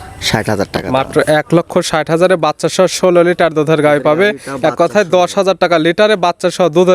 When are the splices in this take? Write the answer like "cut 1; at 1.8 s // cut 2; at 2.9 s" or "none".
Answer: none